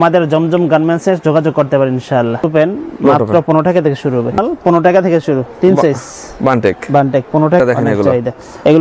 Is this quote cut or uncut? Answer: cut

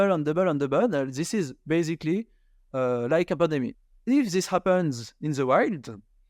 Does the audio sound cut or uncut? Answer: cut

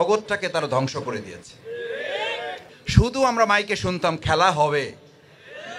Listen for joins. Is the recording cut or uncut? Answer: cut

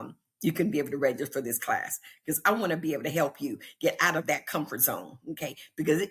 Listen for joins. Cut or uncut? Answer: uncut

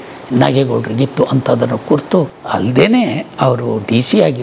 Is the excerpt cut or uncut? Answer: cut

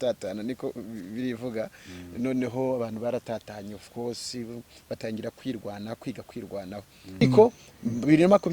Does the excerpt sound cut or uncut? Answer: cut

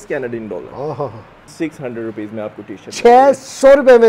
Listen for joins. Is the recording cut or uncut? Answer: cut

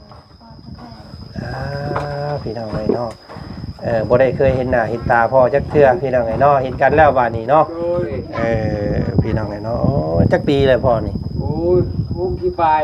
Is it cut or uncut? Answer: cut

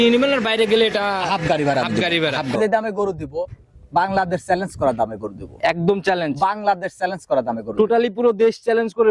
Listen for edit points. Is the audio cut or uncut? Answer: cut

